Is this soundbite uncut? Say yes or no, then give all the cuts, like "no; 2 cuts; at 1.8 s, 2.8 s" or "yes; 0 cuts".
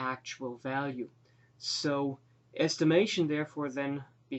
yes; 0 cuts